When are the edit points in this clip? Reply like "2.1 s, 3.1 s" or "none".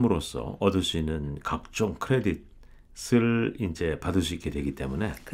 none